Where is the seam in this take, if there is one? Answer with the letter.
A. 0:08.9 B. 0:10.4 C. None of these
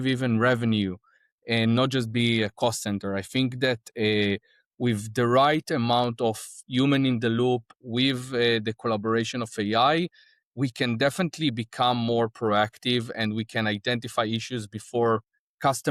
C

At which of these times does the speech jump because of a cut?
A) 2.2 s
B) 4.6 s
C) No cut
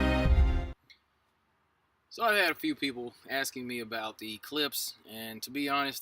B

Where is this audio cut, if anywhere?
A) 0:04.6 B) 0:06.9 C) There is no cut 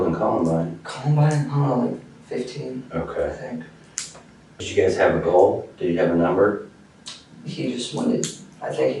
A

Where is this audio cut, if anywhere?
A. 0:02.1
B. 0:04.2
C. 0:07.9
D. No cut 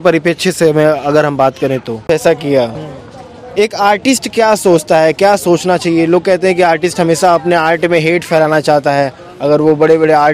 A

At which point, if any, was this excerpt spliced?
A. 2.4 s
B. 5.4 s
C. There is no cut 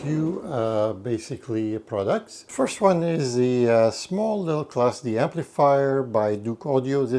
A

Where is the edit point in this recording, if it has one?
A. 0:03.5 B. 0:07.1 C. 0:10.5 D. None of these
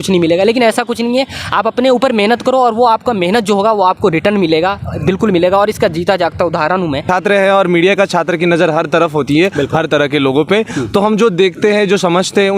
B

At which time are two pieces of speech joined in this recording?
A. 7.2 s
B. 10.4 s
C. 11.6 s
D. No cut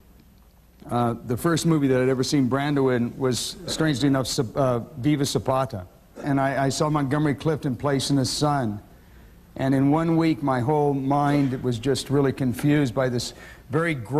B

